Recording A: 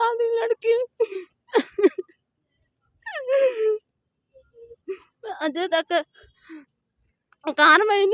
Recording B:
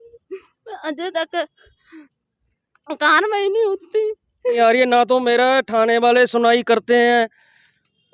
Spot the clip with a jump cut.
B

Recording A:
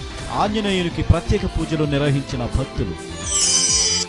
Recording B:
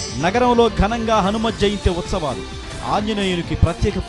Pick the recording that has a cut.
A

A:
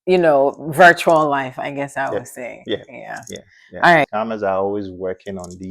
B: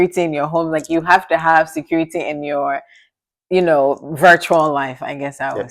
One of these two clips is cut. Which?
A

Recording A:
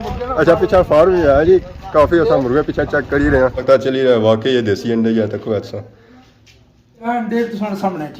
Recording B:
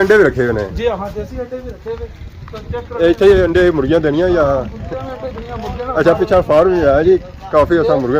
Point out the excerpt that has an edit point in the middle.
A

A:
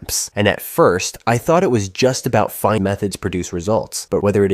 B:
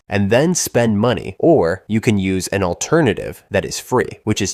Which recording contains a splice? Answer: A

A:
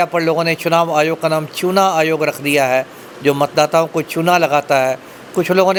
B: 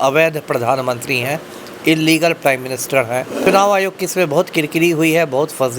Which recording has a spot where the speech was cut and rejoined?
B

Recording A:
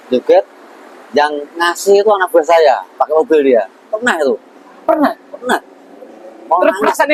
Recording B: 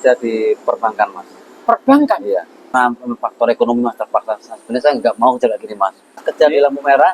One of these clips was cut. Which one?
B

